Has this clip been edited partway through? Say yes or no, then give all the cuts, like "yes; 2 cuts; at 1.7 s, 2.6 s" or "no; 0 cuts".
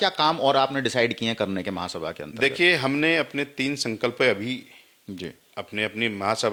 no; 0 cuts